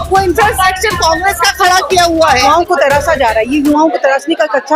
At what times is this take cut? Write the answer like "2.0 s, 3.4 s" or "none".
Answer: 2.5 s